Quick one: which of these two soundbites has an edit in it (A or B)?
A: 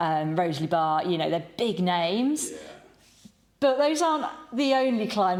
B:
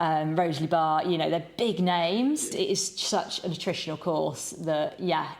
B